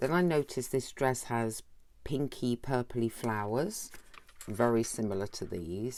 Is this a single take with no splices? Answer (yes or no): yes